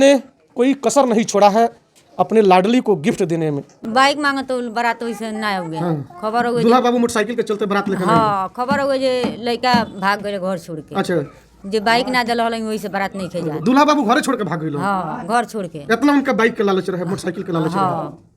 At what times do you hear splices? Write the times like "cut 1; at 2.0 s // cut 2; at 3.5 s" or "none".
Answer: cut 1; at 3.7 s